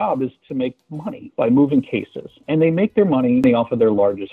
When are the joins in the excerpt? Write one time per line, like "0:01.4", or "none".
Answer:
0:03.4